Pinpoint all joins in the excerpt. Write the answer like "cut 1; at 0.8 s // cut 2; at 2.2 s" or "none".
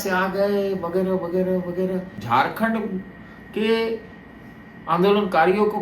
cut 1; at 2.1 s